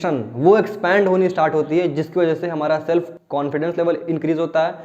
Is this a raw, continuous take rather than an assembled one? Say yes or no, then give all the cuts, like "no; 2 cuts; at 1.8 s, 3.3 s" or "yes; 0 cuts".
yes; 0 cuts